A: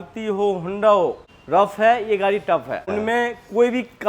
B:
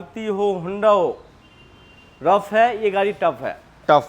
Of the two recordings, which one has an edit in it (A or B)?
A